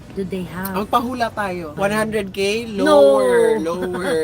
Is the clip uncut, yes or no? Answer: no